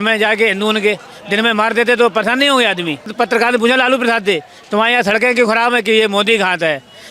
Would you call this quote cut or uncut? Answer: cut